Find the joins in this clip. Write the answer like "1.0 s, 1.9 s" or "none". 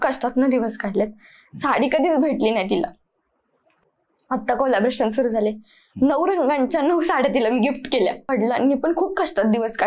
8.3 s